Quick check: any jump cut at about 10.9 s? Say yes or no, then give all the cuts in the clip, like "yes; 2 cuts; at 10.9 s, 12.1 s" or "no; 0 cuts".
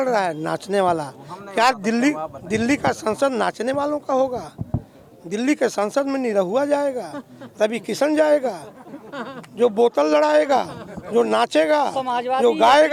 no; 0 cuts